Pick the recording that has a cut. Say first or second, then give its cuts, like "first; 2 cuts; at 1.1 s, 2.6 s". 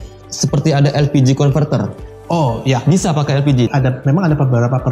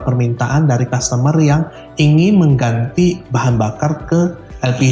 first; 1 cut; at 3.7 s